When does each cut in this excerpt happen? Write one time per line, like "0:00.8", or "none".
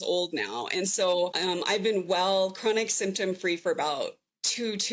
0:01.4